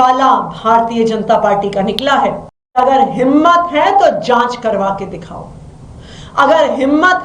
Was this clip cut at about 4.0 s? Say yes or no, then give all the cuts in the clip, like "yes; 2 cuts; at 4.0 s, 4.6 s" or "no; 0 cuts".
no; 1 cut; at 2.8 s